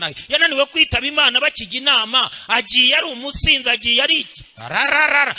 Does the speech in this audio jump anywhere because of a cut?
no; 0 cuts

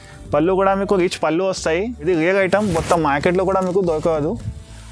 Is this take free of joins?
no; 1 cut; at 2.0 s

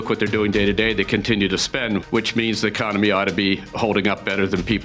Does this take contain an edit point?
yes; 1 cut; at 2.0 s

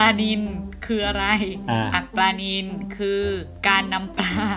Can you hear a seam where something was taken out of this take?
yes; 2 cuts; at 1.6 s, 3.5 s

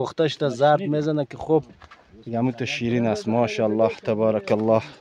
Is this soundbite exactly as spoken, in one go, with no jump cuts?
yes; 0 cuts

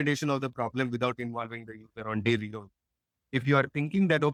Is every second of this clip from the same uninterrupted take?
yes; 0 cuts

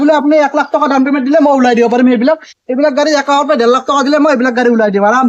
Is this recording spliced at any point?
no; 0 cuts

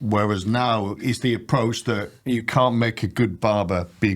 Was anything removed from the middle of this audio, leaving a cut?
yes; 3 cuts; at 1.0 s, 2.1 s, 3.3 s

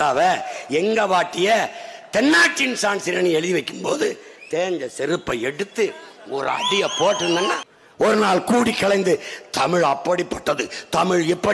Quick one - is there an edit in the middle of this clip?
yes; 1 cut; at 7.6 s

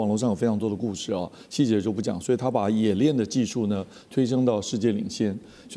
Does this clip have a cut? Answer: no; 0 cuts

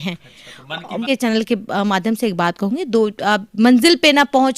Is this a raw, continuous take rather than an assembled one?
no; 1 cut; at 1.0 s

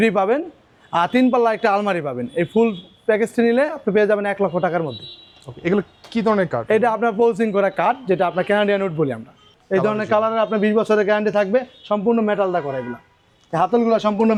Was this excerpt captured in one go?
yes; 0 cuts

